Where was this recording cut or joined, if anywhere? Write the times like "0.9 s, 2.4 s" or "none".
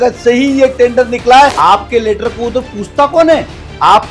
1.5 s